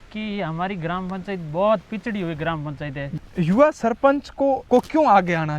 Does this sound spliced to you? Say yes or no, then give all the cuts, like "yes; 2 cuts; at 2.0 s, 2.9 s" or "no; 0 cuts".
yes; 2 cuts; at 3.1 s, 4.6 s